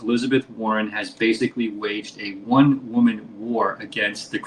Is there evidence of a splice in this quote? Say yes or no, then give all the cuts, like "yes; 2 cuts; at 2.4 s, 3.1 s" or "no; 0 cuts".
no; 0 cuts